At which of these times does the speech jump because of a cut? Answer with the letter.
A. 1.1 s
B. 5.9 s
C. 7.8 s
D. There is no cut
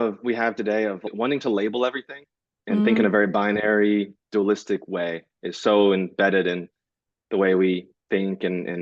A